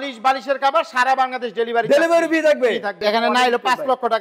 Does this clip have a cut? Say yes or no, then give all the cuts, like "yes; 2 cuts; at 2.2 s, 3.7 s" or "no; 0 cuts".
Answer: yes; 1 cut; at 2.9 s